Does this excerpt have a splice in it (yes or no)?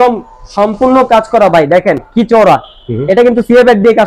no